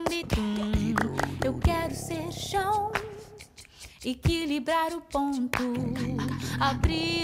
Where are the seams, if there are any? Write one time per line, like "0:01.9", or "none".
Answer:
none